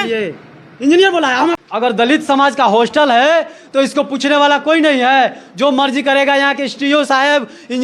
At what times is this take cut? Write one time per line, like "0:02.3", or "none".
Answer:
0:01.6